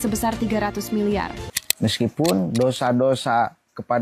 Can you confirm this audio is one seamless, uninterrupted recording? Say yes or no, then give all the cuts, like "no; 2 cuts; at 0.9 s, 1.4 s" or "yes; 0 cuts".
no; 1 cut; at 1.6 s